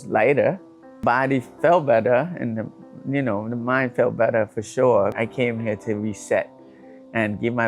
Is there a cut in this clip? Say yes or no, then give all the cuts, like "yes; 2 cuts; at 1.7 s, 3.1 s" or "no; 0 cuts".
yes; 2 cuts; at 1.0 s, 5.1 s